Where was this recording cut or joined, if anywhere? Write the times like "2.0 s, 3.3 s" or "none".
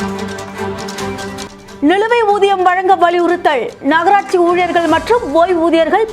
1.2 s